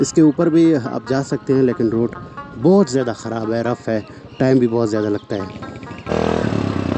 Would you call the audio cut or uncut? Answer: cut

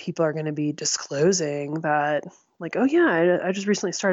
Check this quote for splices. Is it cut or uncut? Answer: uncut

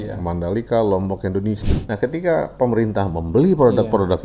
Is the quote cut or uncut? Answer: cut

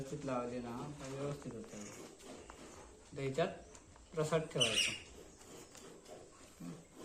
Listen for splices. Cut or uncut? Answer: uncut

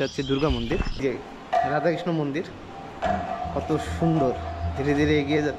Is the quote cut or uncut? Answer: cut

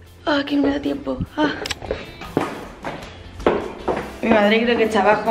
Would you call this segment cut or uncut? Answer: uncut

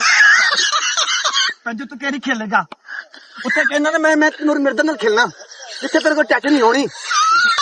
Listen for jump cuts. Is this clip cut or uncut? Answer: uncut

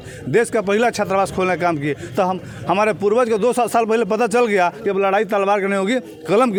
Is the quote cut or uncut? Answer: uncut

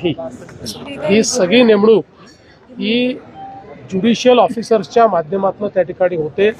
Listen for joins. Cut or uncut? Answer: uncut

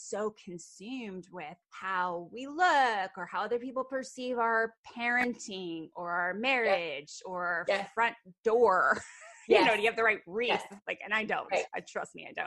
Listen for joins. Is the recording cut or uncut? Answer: cut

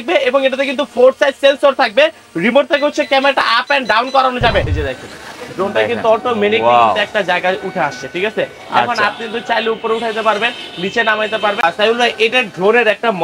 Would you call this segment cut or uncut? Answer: cut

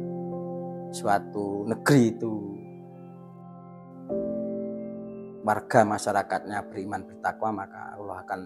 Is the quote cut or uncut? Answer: uncut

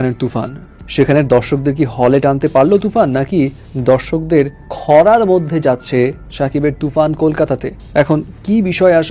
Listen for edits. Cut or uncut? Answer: uncut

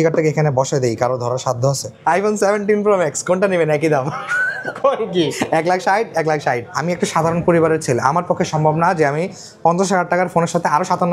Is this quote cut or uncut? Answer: cut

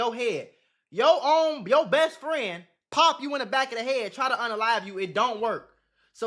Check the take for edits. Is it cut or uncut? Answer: uncut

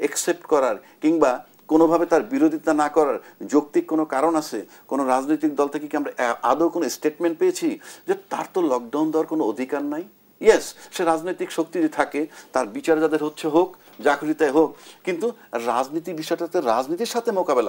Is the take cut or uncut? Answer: uncut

